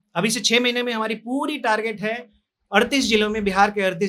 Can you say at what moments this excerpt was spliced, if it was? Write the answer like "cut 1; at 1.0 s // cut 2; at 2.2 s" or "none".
none